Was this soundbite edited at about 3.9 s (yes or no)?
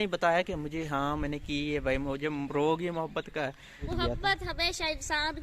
yes